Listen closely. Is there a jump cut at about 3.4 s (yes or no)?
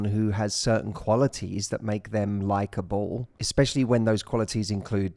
yes